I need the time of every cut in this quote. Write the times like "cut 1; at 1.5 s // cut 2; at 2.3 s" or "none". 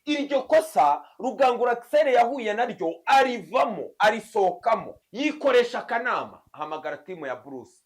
cut 1; at 5.0 s